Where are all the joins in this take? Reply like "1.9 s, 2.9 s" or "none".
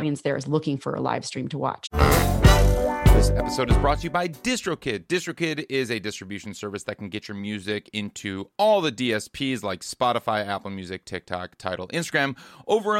1.8 s